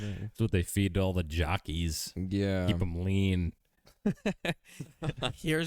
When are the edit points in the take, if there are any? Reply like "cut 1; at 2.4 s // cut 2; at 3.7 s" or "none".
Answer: none